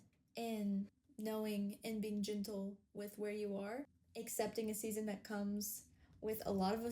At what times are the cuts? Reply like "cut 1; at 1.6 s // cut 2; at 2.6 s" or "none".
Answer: cut 1; at 1.0 s // cut 2; at 4.0 s